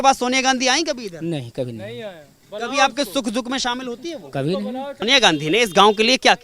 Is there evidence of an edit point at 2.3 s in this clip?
no; 1 cut; at 5.0 s

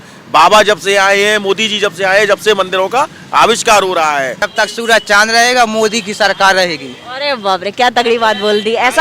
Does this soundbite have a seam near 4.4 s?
yes; 1 cut; at 4.4 s

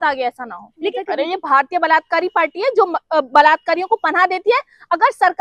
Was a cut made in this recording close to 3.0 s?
no; 1 cut; at 0.9 s

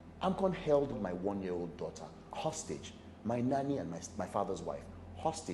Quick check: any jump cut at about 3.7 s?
no; 2 cuts; at 1.0 s, 2.2 s

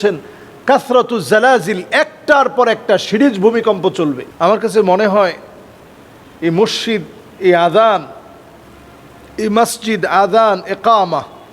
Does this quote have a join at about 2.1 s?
no; 1 cut; at 4.3 s

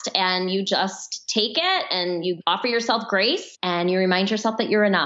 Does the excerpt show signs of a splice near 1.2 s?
no; 2 cuts; at 2.4 s, 3.5 s

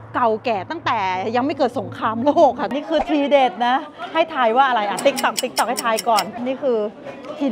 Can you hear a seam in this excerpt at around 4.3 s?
no; 2 cuts; at 2.8 s, 6.4 s

